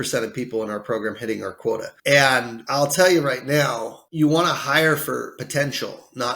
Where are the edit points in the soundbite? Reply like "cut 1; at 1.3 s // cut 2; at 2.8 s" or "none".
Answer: cut 1; at 1.9 s // cut 2; at 2.6 s // cut 3; at 4.0 s // cut 4; at 5.4 s

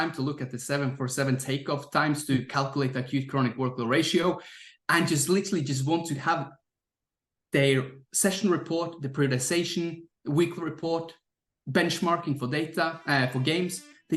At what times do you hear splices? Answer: none

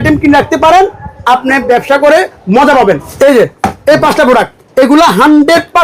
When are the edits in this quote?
cut 1; at 3.1 s // cut 2; at 4.6 s

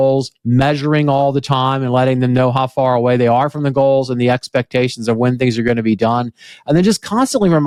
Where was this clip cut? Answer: none

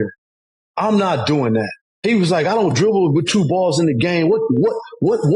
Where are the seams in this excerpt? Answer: cut 1; at 1.8 s

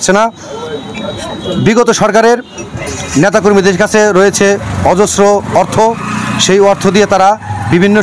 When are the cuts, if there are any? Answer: none

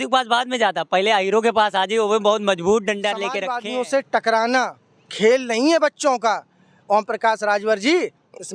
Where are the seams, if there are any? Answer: cut 1; at 3.5 s

